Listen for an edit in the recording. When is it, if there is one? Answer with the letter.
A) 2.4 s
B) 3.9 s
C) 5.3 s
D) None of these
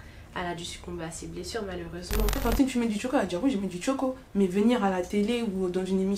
A